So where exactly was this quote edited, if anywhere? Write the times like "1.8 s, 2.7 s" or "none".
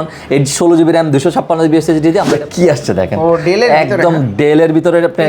2.3 s